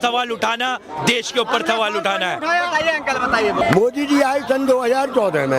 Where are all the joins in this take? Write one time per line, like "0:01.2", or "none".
0:03.6

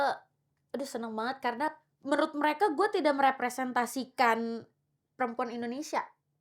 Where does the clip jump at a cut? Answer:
0:01.7

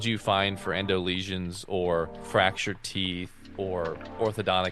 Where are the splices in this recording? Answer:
0:02.2
0:03.6

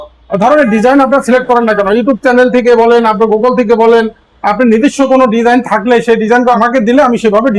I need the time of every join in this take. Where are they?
0:06.6

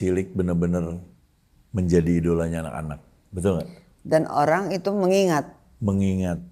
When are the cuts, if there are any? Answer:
none

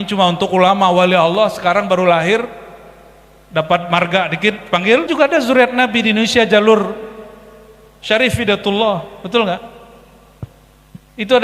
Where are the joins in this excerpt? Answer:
0:05.1

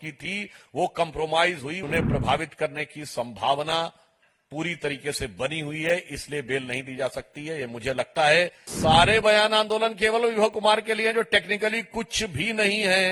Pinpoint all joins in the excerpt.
0:01.8
0:08.6

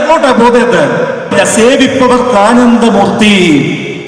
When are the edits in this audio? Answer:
0:01.3

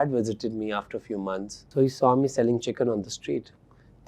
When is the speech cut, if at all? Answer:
0:01.6

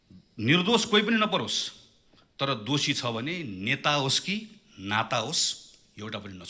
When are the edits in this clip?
none

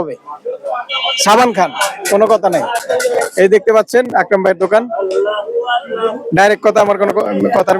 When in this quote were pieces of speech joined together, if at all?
none

